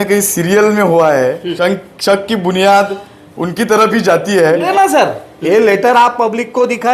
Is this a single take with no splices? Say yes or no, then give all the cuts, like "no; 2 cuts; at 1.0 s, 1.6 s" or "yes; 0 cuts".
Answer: no; 2 cuts; at 1.5 s, 4.7 s